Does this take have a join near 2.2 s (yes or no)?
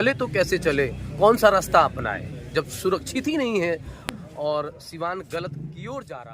no